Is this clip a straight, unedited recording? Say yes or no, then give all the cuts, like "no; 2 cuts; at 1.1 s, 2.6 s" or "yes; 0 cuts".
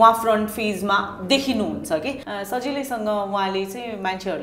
no; 1 cut; at 2.2 s